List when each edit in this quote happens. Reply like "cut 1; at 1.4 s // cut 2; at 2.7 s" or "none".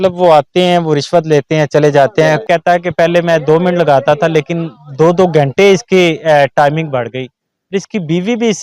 cut 1; at 2.4 s

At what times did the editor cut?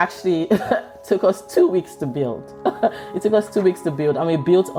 none

